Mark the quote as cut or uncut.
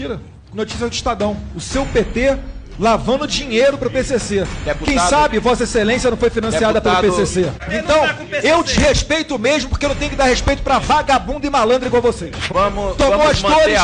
cut